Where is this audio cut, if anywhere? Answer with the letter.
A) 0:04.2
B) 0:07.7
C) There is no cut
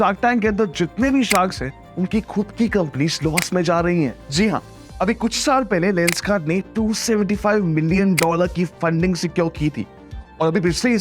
C